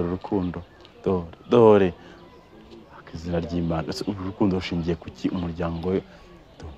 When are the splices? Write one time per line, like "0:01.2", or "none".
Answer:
none